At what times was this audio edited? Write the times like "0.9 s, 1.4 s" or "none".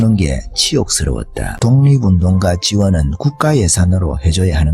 1.5 s